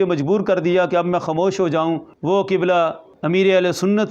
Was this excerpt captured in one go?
no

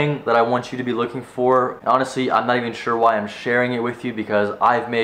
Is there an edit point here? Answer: yes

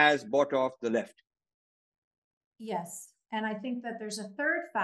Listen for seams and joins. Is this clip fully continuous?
yes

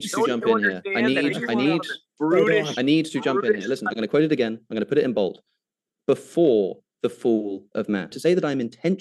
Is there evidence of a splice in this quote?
yes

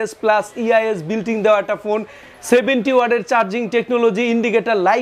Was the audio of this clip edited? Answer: no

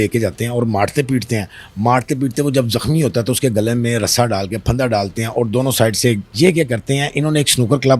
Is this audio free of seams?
no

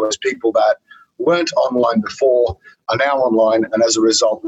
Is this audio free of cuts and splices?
yes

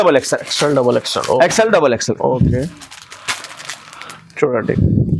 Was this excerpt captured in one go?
yes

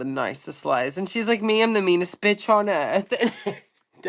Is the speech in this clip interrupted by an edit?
no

